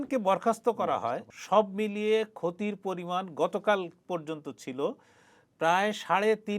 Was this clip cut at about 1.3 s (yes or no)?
yes